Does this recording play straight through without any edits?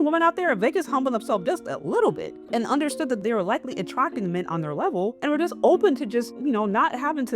no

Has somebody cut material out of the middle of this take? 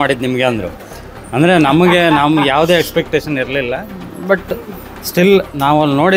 no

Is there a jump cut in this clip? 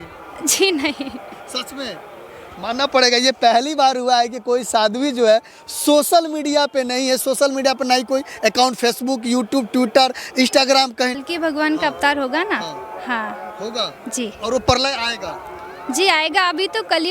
yes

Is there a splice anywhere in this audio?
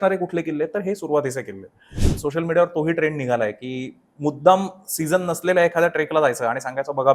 yes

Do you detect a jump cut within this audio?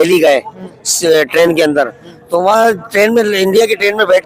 no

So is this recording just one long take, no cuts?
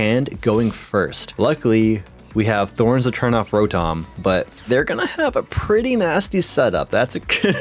yes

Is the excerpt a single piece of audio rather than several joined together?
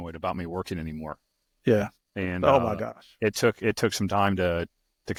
yes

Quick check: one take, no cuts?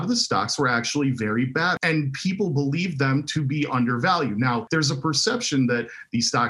no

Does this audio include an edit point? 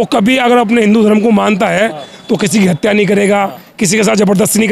no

